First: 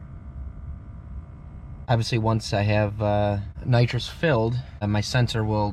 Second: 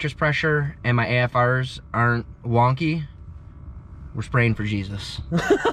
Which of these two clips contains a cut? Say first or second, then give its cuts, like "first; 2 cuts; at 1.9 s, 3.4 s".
first; 3 cuts; at 1.9 s, 3.5 s, 4.8 s